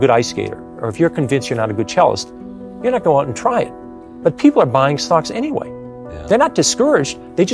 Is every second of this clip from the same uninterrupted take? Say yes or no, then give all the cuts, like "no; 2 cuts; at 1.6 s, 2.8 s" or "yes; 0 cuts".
yes; 0 cuts